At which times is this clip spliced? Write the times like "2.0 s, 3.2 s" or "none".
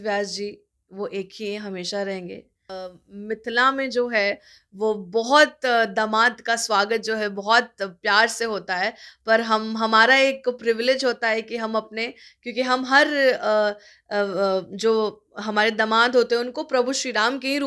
2.8 s